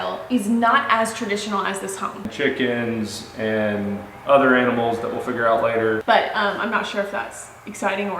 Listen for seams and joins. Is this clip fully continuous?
no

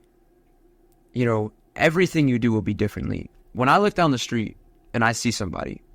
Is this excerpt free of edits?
no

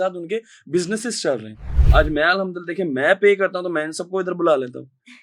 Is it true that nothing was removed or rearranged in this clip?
no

